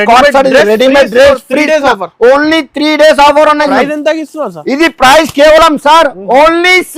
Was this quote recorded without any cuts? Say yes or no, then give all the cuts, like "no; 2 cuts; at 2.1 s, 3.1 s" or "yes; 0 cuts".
no; 1 cut; at 3.7 s